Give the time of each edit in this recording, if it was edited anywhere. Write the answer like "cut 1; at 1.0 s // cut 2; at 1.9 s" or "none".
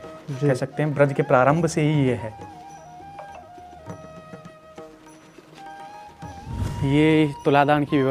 none